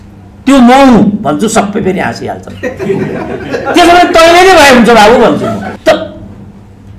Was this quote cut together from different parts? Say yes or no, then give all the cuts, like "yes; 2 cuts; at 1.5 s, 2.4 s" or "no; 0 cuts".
yes; 1 cut; at 5.7 s